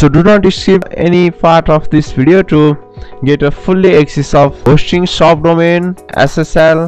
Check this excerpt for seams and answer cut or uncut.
cut